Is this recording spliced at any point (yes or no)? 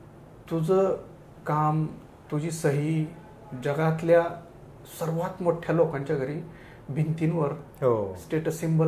no